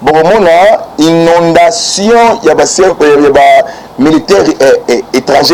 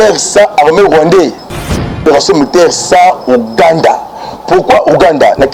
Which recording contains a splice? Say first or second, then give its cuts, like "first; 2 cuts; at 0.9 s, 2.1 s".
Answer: second; 1 cut; at 2.0 s